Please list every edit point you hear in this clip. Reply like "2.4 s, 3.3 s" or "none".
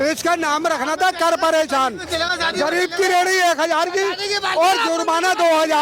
none